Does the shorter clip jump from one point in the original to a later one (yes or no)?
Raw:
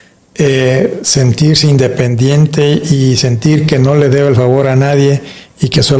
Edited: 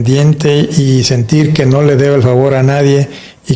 no